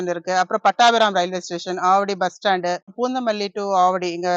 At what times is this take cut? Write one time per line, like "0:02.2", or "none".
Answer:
0:02.9